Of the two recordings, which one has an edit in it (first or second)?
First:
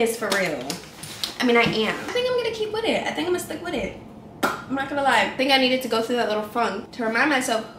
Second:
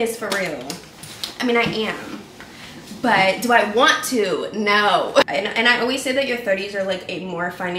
first